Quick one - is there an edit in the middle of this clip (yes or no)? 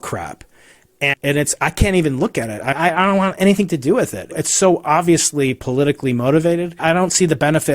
yes